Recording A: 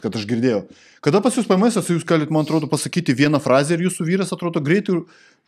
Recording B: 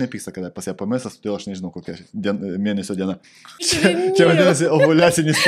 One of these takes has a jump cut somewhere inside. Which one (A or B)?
B